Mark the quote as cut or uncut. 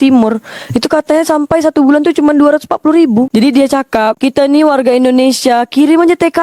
cut